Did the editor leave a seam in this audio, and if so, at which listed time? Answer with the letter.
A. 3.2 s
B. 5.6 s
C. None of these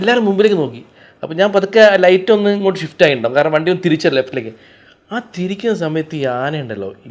C